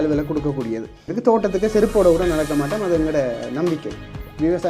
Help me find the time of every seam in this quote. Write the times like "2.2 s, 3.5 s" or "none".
1.1 s

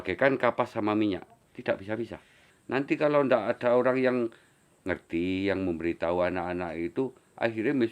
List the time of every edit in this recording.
2.5 s

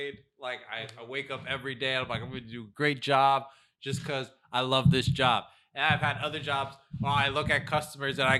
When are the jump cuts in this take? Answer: none

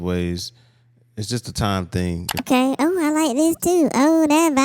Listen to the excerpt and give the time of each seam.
2.4 s

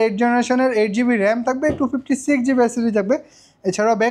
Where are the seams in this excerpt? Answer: none

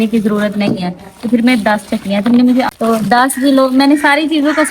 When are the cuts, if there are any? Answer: 2.7 s

